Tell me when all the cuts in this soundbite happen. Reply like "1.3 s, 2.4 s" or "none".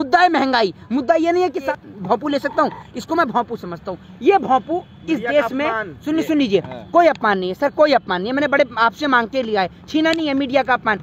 1.7 s